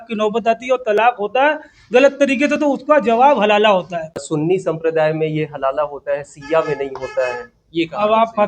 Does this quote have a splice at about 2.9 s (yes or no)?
no